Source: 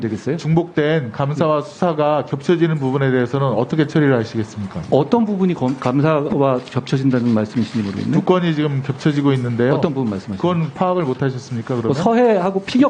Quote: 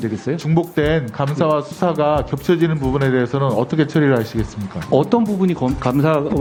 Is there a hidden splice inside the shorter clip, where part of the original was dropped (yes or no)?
no